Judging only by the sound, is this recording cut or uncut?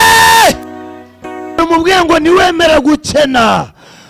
cut